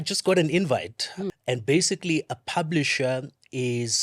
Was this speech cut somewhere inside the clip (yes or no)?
yes